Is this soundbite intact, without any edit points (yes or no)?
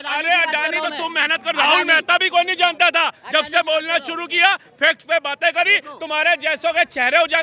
yes